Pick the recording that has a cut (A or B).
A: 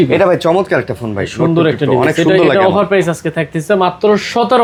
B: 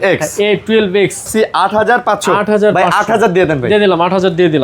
B